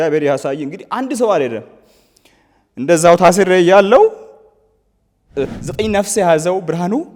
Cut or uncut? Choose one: cut